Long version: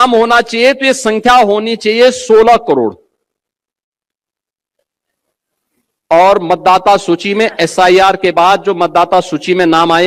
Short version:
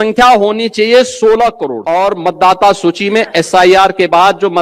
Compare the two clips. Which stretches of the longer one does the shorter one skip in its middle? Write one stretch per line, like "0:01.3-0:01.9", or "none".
0:02.8-0:05.9